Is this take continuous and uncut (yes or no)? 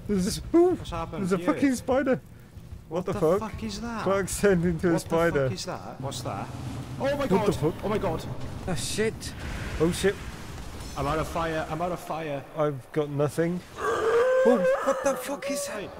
no